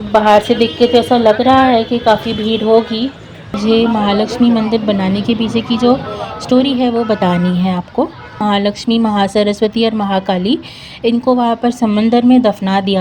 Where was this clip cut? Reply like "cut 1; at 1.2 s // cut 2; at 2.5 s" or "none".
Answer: cut 1; at 3.6 s // cut 2; at 8.4 s